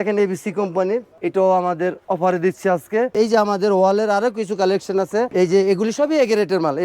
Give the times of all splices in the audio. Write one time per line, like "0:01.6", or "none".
0:01.1
0:03.1
0:05.3